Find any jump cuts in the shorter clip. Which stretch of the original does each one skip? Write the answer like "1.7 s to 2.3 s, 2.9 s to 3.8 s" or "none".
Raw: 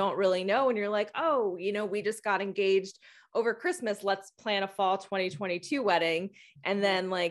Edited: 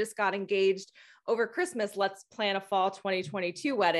none